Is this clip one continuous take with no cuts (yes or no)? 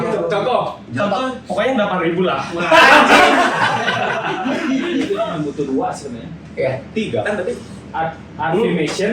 no